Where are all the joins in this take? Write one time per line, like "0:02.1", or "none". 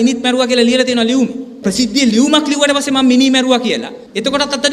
0:01.6